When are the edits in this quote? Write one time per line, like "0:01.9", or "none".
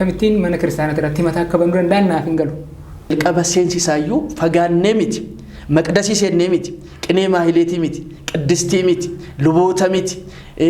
0:03.1